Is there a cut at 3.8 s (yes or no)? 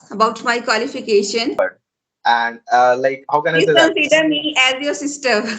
no